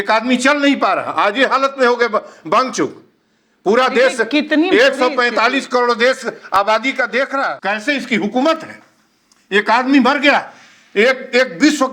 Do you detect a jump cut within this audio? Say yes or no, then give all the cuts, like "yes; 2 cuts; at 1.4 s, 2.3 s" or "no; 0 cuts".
yes; 1 cut; at 7.6 s